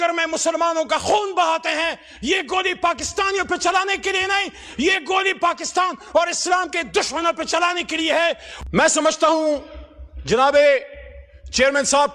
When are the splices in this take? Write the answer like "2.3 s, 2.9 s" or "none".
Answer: 8.5 s